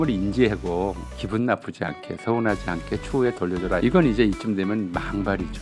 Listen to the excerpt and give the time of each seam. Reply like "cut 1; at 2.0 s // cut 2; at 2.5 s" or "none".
cut 1; at 3.8 s